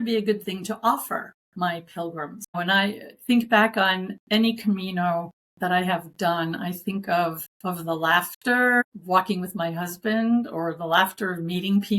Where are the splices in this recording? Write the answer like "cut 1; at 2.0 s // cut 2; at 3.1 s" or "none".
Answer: cut 1; at 1.4 s // cut 2; at 2.6 s // cut 3; at 4.1 s // cut 4; at 5.4 s // cut 5; at 7.5 s // cut 6; at 8.8 s